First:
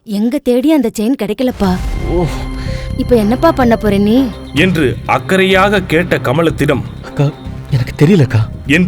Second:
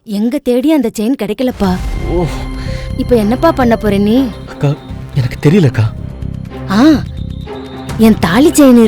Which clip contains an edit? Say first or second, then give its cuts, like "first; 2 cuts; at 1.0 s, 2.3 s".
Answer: second; 2 cuts; at 4.4 s, 5.9 s